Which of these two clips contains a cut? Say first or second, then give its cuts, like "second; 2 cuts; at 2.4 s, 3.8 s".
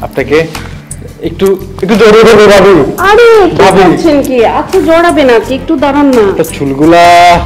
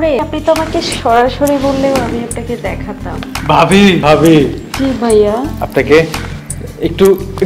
second; 1 cut; at 4.0 s